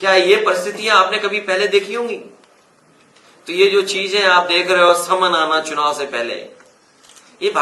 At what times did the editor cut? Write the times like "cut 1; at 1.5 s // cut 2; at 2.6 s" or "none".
none